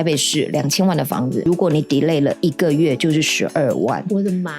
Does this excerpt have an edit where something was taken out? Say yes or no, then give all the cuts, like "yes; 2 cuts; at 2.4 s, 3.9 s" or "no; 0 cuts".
yes; 1 cut; at 1.5 s